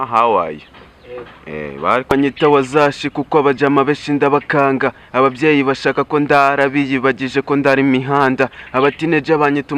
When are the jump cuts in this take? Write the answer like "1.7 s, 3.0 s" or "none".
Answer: 2.1 s